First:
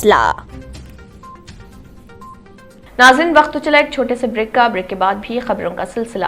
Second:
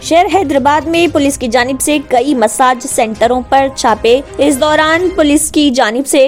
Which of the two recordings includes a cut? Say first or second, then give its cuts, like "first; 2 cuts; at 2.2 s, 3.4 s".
first; 1 cut; at 2.8 s